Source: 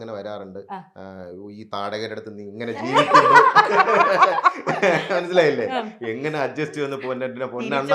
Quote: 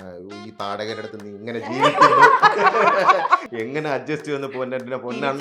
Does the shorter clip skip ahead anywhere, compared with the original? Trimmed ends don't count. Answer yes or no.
yes